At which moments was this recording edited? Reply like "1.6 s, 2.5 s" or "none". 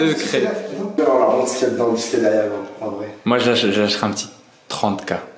0.9 s